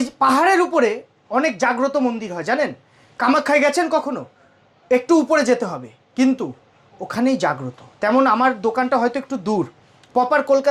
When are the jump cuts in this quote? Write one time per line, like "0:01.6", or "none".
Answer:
none